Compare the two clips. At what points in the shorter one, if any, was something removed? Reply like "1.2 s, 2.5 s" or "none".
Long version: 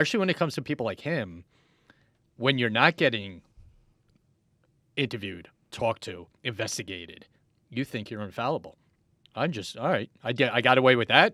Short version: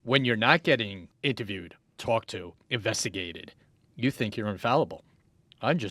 1.0 s